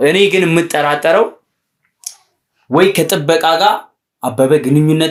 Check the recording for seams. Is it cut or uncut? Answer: uncut